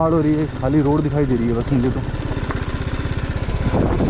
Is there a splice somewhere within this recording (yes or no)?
no